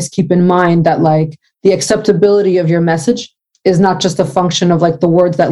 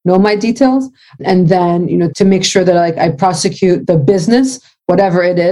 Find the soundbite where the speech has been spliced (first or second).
second